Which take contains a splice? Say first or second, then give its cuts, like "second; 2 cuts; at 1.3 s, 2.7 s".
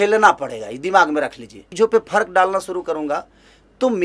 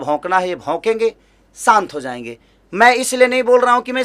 first; 1 cut; at 1.6 s